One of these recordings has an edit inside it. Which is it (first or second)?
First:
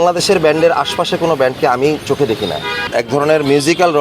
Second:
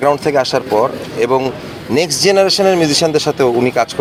first